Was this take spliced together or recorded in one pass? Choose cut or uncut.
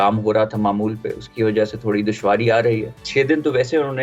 cut